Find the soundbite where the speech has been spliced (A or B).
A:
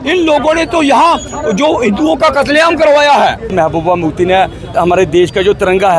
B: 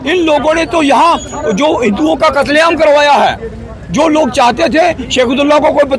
A